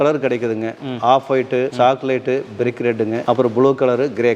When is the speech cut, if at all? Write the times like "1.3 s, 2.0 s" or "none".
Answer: 1.7 s, 3.2 s

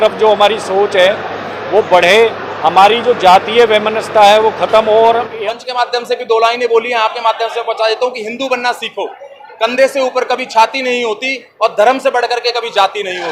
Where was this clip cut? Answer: 5.4 s

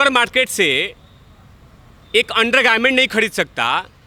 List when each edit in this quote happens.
none

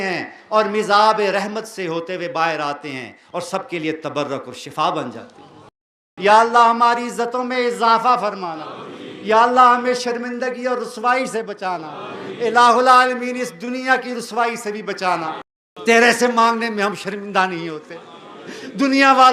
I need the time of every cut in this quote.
6.1 s, 15.5 s

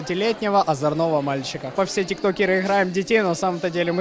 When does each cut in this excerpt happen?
1.7 s

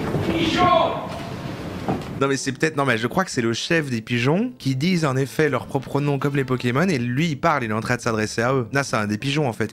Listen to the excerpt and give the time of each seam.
2.2 s, 8.7 s

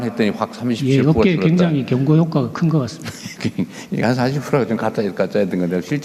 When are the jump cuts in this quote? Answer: none

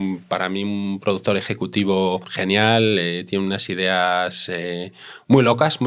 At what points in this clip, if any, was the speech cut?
2.3 s

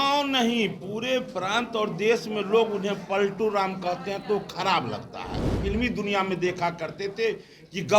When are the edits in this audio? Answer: 5.6 s

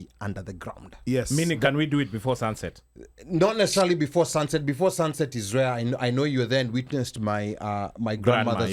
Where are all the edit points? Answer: none

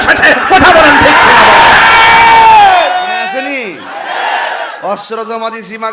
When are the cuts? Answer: 3.3 s

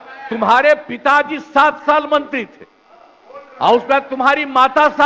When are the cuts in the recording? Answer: none

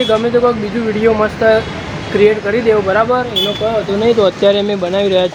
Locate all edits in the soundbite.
none

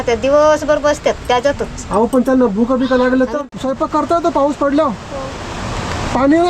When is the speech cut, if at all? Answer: 3.4 s

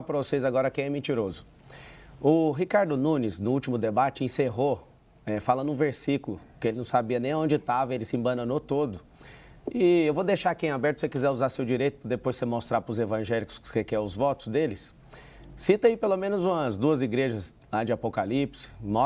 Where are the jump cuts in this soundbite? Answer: none

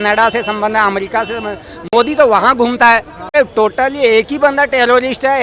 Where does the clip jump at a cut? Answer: none

